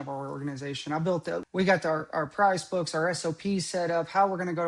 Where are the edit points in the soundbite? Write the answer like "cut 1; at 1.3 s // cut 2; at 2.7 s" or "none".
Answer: cut 1; at 1.4 s